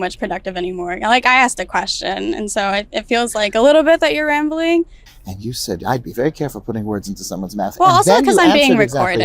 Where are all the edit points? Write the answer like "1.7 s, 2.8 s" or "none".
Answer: 5.1 s